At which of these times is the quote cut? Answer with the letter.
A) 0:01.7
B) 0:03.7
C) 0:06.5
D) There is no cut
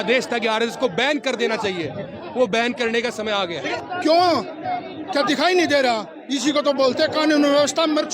B